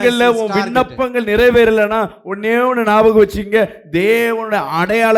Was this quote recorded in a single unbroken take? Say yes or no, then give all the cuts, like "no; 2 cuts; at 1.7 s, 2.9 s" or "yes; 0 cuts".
yes; 0 cuts